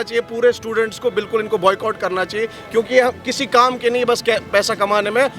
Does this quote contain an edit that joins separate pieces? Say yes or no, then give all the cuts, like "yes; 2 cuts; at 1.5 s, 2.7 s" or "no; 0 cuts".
no; 0 cuts